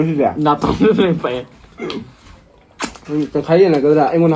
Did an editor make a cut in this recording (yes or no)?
no